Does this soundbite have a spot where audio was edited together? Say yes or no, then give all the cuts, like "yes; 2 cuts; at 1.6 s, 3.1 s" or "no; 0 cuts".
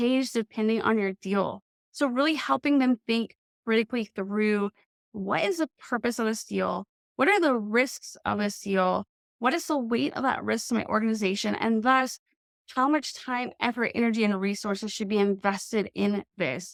no; 0 cuts